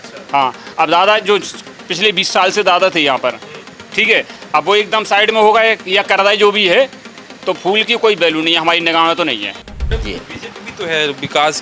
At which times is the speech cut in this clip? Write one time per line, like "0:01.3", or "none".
0:09.9